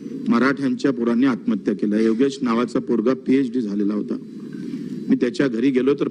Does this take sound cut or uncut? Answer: uncut